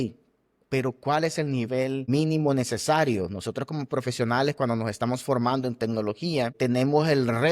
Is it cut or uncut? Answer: cut